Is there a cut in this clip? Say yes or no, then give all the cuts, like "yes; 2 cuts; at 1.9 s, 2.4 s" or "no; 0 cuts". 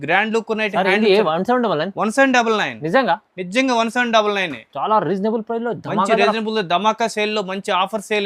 no; 0 cuts